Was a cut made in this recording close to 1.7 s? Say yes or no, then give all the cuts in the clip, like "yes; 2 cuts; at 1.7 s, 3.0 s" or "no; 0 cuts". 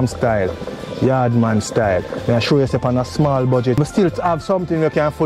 no; 1 cut; at 3.8 s